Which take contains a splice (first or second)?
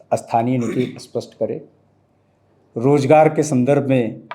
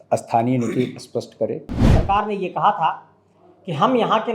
second